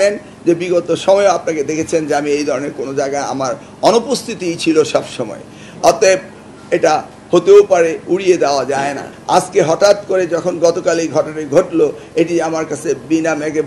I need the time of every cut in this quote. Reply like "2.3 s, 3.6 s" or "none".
9.1 s